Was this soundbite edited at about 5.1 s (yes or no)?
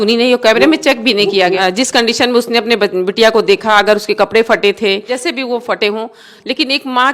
yes